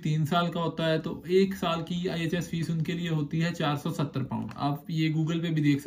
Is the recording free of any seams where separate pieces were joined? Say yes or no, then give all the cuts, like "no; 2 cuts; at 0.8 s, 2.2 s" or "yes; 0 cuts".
yes; 0 cuts